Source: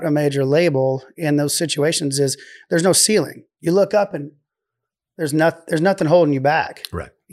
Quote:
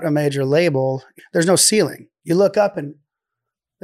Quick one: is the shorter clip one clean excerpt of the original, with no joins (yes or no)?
no